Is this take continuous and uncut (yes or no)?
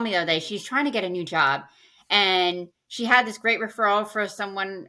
yes